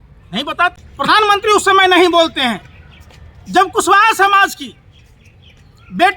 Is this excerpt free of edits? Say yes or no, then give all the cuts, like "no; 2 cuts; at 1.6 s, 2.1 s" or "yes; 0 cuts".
no; 1 cut; at 1.2 s